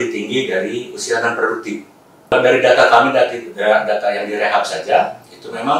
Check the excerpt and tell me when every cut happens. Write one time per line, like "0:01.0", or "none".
0:02.3